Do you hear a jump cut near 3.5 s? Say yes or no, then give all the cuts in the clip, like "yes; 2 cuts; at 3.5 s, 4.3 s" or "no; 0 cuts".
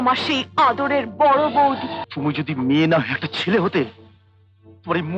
no; 1 cut; at 1.9 s